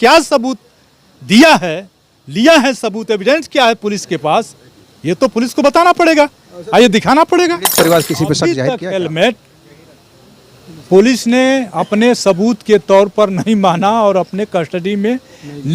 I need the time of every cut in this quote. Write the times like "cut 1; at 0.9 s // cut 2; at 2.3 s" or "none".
cut 1; at 8.6 s